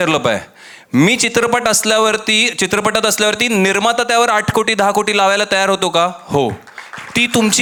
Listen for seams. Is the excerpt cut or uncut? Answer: uncut